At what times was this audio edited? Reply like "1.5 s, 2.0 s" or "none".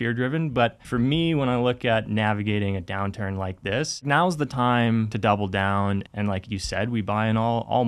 0.8 s, 4.0 s, 5.1 s, 6.0 s